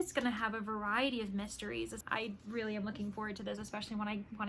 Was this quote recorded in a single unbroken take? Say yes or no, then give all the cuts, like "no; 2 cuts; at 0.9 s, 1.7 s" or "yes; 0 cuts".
no; 1 cut; at 2.0 s